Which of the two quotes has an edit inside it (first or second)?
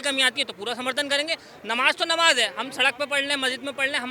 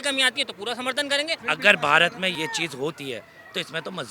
second